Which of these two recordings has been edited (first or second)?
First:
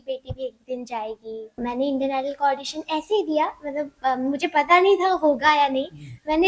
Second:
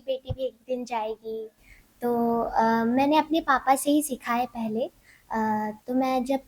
first